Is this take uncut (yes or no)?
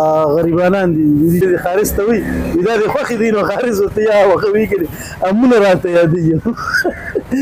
no